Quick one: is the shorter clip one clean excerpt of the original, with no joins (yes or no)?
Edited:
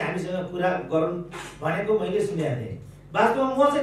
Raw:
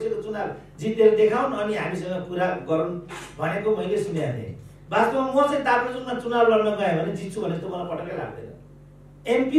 yes